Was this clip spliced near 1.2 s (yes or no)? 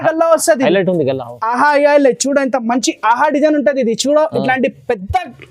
yes